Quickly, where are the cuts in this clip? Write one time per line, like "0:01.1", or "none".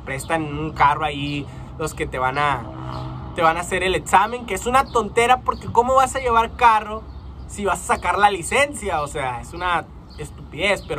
none

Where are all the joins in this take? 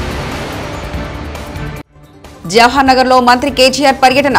0:02.0

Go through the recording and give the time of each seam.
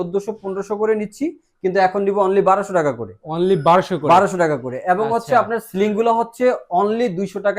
none

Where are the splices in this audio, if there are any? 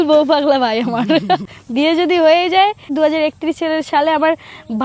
0:01.6
0:02.9

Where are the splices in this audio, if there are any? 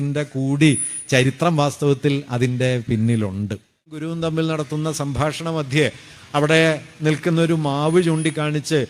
0:04.0

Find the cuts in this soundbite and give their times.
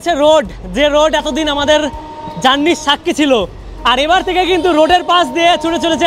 none

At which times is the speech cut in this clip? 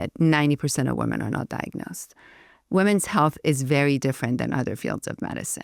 none

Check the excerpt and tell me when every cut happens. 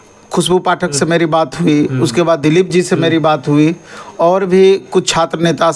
none

